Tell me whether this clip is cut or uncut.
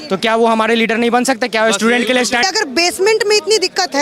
cut